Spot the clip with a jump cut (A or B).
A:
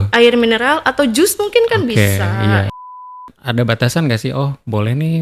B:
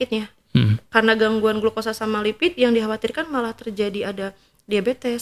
A